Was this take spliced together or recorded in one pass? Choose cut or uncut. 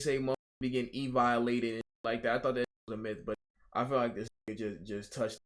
cut